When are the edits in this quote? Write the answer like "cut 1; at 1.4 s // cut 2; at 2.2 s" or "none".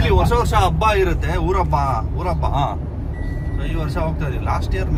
none